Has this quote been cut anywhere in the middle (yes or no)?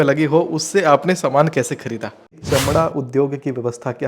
yes